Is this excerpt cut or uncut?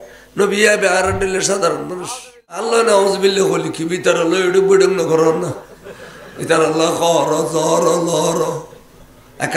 cut